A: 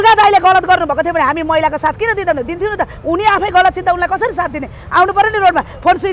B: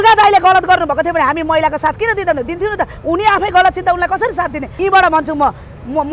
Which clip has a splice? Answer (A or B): B